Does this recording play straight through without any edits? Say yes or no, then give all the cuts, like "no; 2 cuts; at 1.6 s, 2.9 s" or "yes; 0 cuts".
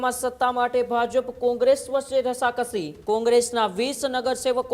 no; 1 cut; at 2.9 s